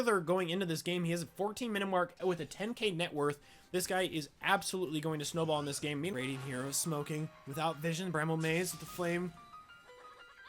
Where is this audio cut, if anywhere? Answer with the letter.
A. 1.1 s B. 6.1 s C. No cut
B